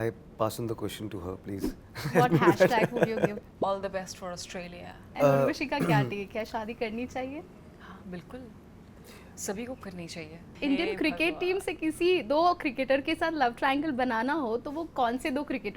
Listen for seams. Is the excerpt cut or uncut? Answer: cut